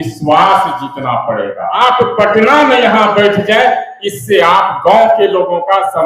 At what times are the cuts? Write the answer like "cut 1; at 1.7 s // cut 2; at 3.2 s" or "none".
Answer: cut 1; at 1.8 s